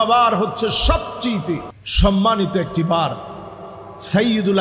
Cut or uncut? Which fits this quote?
cut